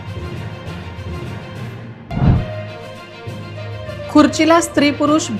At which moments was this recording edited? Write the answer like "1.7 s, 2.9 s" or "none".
none